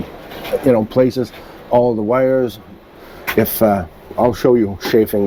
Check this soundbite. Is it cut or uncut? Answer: uncut